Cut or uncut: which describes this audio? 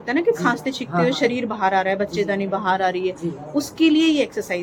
uncut